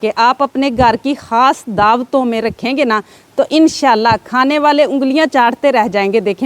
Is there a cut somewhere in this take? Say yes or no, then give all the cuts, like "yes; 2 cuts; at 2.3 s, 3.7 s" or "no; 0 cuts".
no; 0 cuts